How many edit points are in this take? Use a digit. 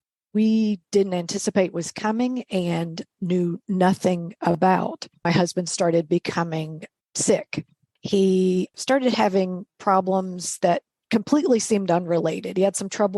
4